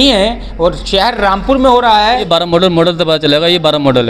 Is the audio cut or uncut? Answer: cut